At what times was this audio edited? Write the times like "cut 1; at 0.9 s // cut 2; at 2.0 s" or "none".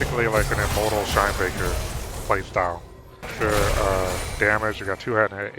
cut 1; at 3.3 s